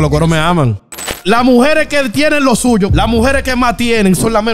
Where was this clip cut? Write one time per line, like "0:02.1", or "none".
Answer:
0:01.1
0:02.9